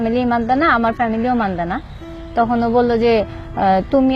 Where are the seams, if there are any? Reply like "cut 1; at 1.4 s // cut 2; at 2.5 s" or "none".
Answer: none